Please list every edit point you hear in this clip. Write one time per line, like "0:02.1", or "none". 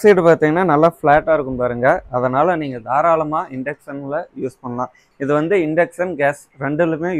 none